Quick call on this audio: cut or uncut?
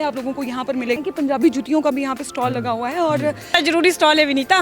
cut